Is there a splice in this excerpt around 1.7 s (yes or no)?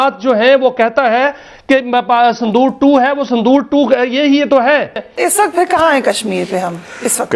no